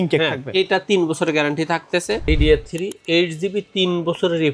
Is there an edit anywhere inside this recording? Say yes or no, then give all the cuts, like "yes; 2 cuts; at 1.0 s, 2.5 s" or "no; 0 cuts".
yes; 1 cut; at 2.2 s